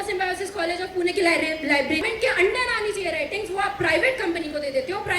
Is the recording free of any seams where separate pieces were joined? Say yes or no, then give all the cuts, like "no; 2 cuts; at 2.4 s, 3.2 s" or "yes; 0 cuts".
no; 1 cut; at 2.0 s